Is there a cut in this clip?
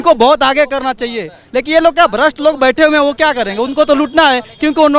no; 0 cuts

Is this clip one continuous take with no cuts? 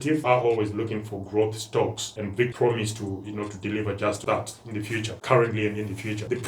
no; 1 cut; at 2.5 s

